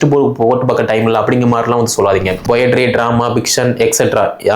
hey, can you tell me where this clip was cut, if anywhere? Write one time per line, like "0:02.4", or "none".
0:02.3